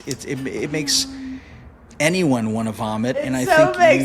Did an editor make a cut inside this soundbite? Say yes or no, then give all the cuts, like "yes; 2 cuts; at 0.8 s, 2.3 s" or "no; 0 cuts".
no; 0 cuts